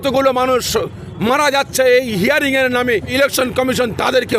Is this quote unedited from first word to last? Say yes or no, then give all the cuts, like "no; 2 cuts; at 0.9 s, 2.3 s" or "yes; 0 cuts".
no; 1 cut; at 3.1 s